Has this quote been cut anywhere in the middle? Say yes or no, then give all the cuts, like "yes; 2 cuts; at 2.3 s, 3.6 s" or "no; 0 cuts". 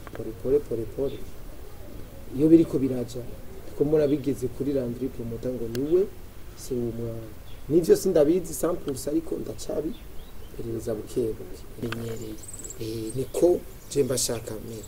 yes; 1 cut; at 11.8 s